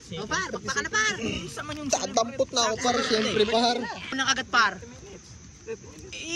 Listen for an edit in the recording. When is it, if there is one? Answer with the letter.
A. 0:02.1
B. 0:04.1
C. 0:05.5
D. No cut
B